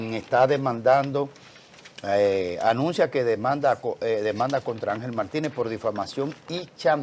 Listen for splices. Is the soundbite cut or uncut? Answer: uncut